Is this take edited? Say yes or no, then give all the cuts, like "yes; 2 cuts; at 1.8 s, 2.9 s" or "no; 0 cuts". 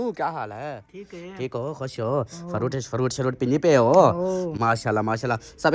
no; 0 cuts